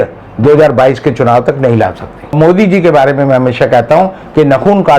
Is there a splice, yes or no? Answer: yes